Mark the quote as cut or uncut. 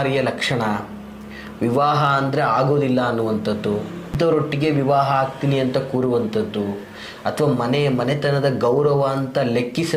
cut